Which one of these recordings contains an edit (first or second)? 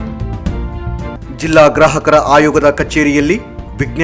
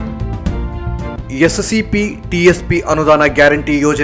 first